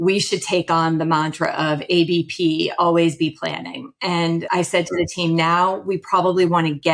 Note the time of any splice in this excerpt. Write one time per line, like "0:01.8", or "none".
0:04.5